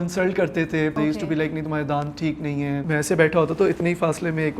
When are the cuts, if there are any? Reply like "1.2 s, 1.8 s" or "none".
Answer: 1.0 s, 2.8 s